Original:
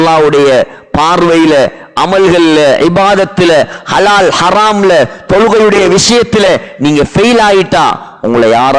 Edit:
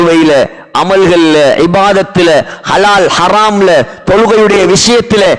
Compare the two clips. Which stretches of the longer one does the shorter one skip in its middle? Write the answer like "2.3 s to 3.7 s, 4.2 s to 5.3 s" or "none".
none